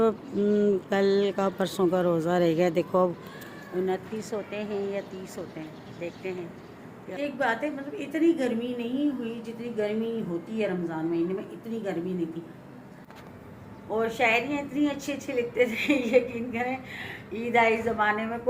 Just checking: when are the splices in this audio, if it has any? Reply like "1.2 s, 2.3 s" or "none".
7.1 s, 13.1 s